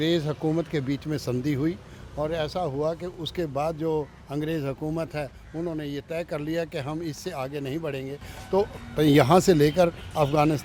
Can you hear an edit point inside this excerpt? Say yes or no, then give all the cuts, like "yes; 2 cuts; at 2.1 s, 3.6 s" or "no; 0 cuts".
no; 0 cuts